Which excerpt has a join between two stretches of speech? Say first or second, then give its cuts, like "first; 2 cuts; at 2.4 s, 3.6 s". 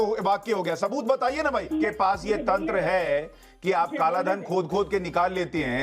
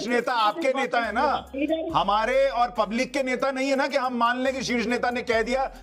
first; 1 cut; at 1.7 s